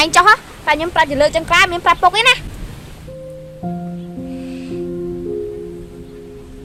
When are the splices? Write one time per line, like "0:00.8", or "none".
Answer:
none